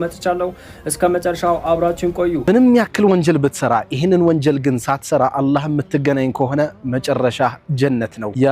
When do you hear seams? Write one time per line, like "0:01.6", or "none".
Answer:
0:02.4